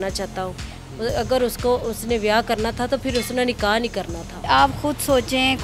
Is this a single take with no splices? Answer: no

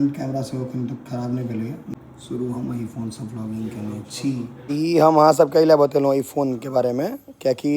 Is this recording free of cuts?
no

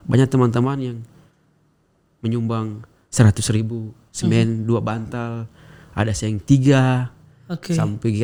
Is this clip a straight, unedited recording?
yes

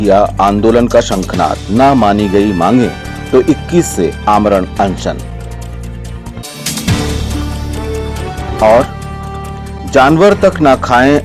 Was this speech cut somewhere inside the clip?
no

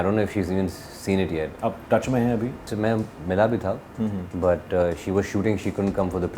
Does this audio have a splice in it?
yes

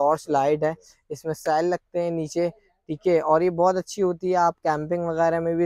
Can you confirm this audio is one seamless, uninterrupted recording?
yes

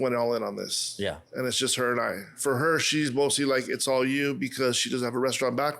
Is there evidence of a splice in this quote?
yes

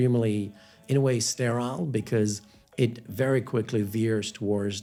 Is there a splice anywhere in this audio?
no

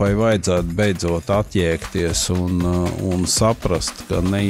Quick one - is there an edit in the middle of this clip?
no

